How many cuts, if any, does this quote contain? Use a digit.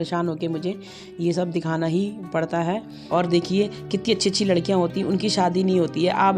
1